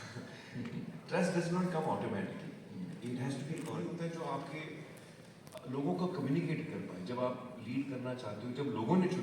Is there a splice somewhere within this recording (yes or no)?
yes